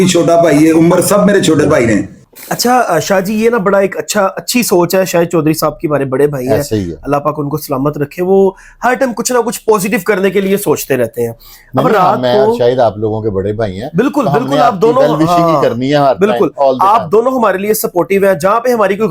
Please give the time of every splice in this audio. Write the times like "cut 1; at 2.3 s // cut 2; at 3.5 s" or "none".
none